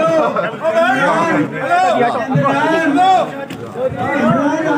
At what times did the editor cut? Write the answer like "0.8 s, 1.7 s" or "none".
none